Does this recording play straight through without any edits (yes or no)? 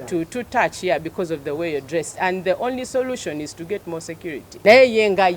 no